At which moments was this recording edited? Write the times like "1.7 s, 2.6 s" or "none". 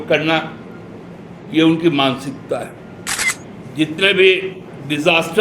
3.3 s